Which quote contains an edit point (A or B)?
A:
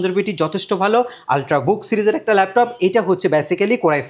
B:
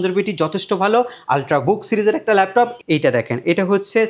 B